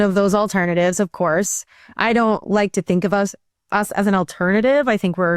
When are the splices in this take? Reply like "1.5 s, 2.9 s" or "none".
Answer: none